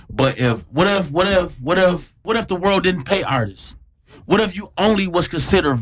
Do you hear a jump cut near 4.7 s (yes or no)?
no